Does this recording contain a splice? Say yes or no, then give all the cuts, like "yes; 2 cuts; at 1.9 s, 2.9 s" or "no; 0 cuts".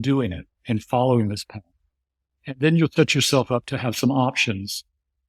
no; 0 cuts